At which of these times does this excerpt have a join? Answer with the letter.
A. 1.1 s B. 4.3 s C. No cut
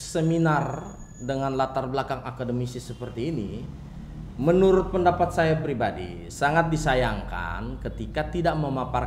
C